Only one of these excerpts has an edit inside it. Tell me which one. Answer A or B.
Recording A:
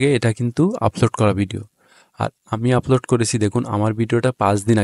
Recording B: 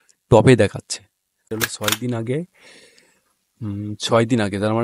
B